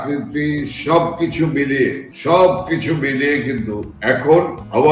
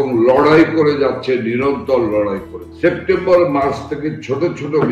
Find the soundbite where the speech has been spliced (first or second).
second